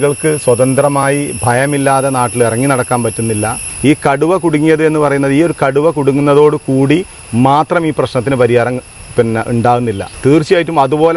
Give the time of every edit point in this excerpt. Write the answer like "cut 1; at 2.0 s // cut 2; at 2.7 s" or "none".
cut 1; at 3.6 s // cut 2; at 10.1 s